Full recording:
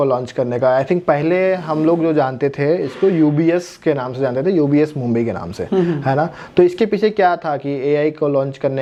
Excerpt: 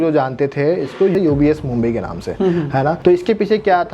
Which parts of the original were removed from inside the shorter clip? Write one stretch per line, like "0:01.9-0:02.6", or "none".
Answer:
0:03.1-0:04.4
0:06.3-0:06.5

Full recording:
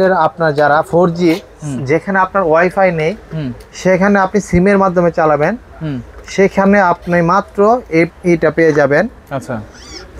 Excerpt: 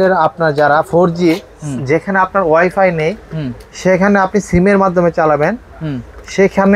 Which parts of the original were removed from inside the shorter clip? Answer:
none

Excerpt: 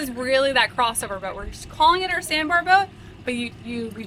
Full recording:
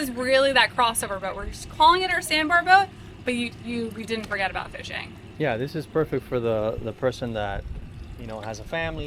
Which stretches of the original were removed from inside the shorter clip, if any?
none

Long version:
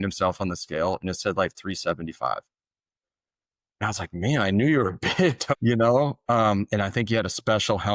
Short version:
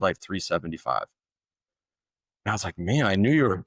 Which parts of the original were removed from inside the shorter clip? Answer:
none

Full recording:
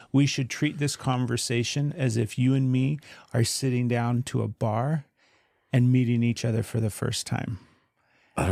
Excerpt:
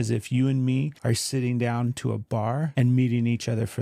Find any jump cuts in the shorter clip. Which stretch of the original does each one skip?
0:03.0-0:03.2
0:05.0-0:05.7

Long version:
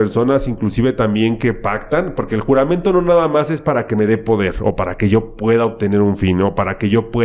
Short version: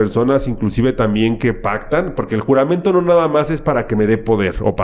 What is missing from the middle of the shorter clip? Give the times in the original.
none

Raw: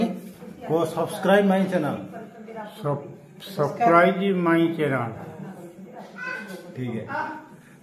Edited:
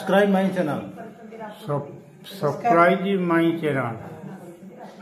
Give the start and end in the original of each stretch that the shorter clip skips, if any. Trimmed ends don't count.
none

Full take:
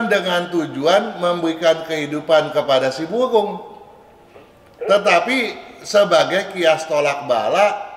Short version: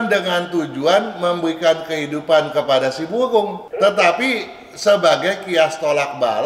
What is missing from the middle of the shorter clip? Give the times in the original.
0:03.6-0:04.7

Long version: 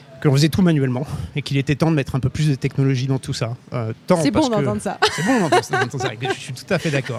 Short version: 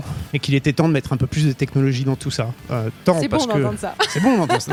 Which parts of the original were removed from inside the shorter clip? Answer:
none

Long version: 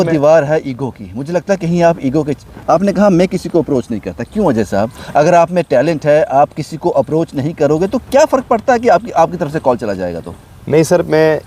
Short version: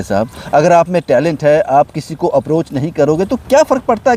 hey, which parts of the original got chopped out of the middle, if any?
none

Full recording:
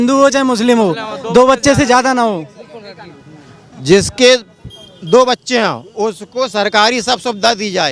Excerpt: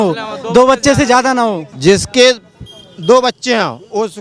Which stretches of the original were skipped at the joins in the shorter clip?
0:02.5-0:03.7

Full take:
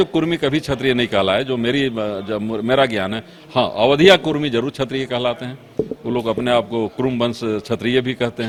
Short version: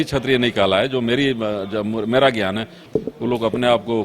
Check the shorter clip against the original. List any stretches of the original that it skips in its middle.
0:03.3-0:05.6

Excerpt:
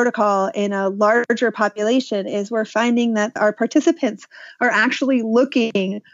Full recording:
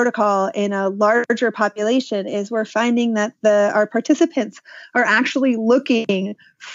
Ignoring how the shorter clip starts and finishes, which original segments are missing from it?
0:03.4-0:03.7

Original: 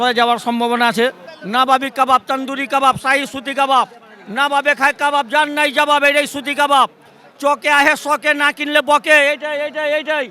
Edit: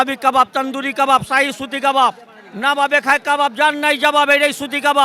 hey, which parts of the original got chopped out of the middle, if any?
none

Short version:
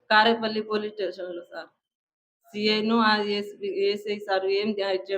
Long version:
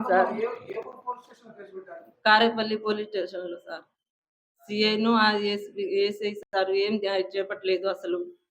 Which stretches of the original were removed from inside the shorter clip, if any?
0:06.4-0:06.5

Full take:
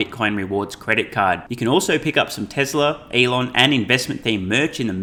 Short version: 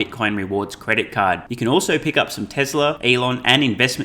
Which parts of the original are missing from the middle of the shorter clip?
0:03.0-0:03.1

